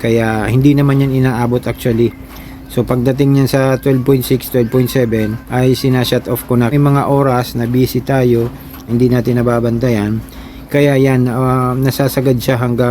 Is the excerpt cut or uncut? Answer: cut